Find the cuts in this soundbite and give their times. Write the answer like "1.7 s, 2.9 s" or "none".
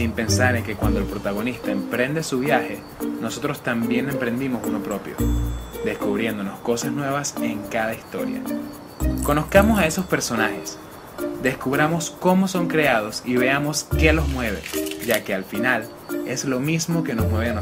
3.4 s